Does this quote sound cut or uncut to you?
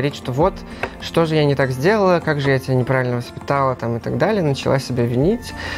uncut